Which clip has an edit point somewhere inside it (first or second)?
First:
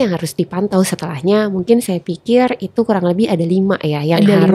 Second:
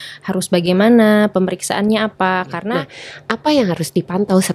second